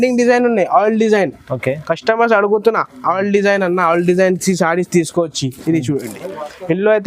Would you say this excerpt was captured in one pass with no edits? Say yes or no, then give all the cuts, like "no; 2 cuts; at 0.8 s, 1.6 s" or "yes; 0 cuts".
yes; 0 cuts